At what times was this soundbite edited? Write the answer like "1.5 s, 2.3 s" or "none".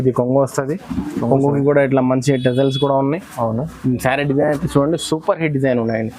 none